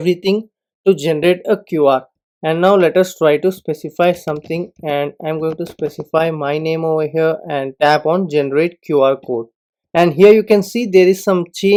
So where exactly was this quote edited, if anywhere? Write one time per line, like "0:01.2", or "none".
none